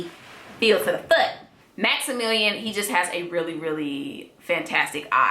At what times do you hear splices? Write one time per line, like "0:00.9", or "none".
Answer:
0:01.5